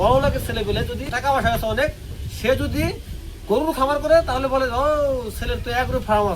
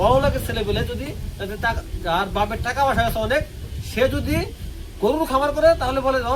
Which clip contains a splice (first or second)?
first